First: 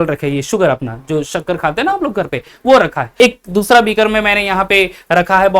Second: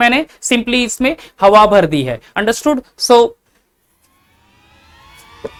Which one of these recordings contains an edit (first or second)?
first